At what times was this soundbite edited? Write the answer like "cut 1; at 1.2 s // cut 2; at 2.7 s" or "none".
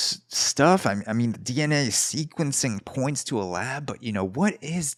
none

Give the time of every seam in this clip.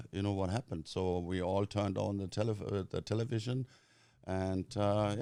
none

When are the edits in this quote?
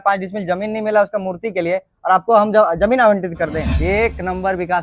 cut 1; at 3.7 s

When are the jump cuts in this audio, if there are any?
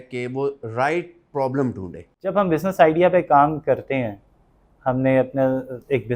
cut 1; at 2.2 s

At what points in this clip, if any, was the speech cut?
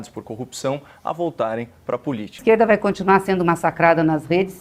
cut 1; at 2.4 s

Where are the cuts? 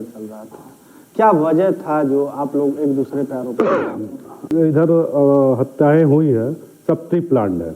cut 1; at 4.5 s

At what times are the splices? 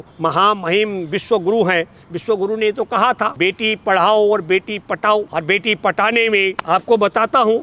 cut 1; at 3.3 s // cut 2; at 5.3 s // cut 3; at 6.6 s

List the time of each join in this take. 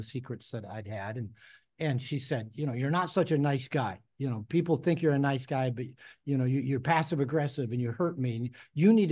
none

